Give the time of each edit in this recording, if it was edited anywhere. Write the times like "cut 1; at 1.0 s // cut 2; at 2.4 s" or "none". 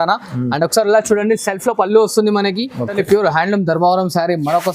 cut 1; at 3.0 s